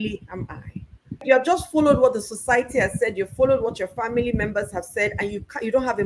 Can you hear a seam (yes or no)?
yes